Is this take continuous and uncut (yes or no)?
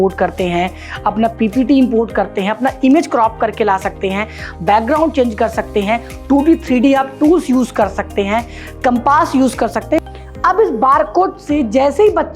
no